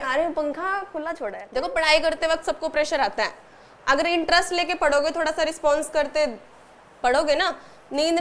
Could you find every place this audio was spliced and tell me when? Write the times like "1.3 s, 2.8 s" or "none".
1.3 s